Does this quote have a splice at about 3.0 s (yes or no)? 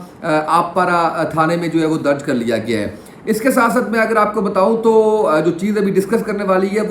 no